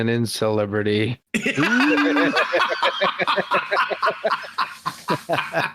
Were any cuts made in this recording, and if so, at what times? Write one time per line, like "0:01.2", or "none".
none